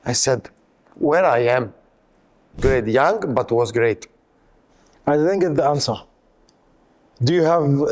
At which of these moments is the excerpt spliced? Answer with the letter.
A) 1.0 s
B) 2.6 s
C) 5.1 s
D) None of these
B